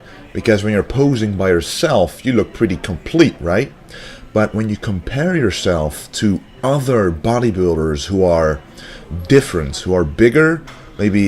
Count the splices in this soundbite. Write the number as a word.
one